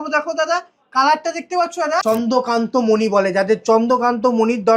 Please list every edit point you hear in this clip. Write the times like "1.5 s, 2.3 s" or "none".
2.0 s